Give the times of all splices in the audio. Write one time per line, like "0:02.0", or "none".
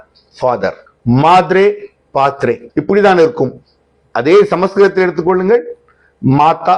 0:00.9
0:02.6